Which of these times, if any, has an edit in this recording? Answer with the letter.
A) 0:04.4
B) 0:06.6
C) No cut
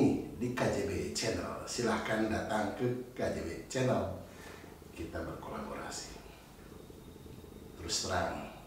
B